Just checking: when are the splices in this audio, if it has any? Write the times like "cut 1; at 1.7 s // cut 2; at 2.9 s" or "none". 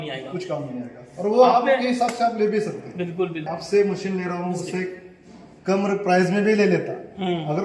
cut 1; at 3.5 s